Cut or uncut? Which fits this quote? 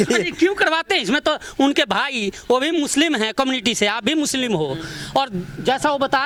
uncut